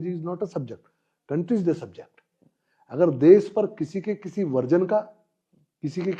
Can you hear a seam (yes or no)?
no